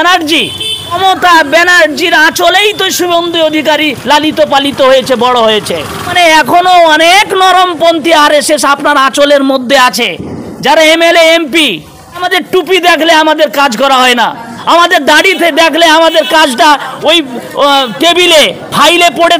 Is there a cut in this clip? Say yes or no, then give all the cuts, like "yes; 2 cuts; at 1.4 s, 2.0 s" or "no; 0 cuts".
yes; 3 cuts; at 1.0 s, 6.1 s, 12.3 s